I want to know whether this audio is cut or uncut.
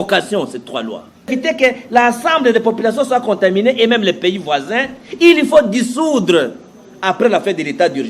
cut